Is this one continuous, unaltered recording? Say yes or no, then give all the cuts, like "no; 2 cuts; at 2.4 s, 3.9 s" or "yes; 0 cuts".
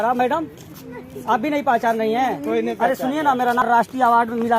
no; 1 cut; at 3.6 s